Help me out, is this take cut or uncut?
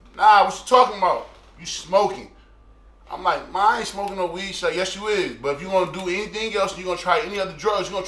uncut